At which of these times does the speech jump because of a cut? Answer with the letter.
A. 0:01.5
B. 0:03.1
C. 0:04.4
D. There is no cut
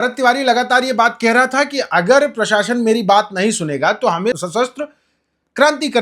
C